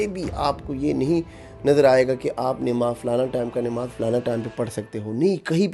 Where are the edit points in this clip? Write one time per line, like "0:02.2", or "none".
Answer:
none